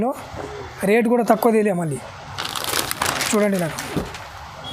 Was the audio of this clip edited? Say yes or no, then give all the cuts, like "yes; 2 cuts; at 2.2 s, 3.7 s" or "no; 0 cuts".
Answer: no; 0 cuts